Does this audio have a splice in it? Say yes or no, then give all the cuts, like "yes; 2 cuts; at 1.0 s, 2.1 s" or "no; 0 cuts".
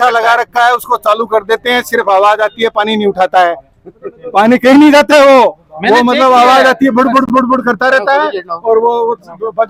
no; 0 cuts